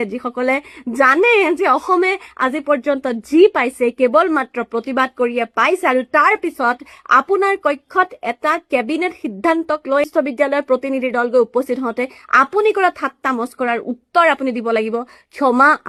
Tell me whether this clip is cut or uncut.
uncut